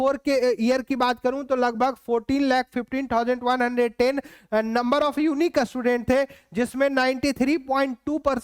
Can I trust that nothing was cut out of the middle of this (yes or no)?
yes